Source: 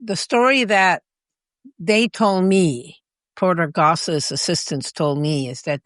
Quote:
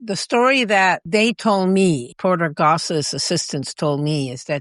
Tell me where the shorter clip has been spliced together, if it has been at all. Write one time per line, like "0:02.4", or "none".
0:01.0
0:02.1